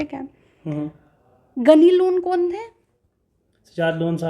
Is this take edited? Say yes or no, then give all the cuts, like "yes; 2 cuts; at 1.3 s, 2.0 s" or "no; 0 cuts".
no; 0 cuts